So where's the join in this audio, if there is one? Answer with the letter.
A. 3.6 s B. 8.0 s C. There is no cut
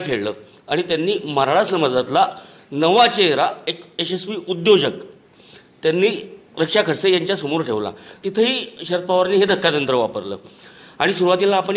B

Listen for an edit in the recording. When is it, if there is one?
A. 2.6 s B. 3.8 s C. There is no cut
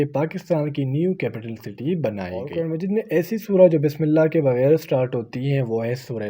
A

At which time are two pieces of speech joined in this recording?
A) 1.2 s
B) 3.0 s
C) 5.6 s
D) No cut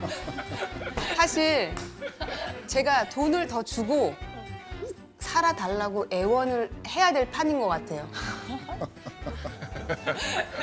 D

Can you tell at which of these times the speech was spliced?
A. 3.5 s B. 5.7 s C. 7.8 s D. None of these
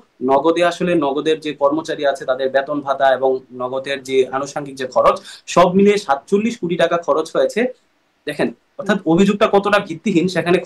D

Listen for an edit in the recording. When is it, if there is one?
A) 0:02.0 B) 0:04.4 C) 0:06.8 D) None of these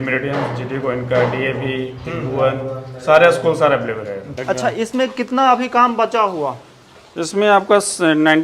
B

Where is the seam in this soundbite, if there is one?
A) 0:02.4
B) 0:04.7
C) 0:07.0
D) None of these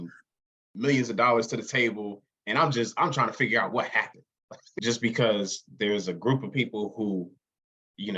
B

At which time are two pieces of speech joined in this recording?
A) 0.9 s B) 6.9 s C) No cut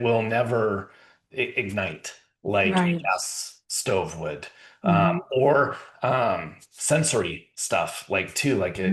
C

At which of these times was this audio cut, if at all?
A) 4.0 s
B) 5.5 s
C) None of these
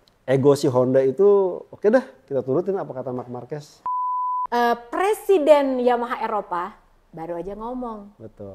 A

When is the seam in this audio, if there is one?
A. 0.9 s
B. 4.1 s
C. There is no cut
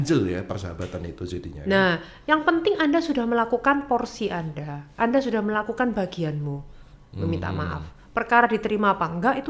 C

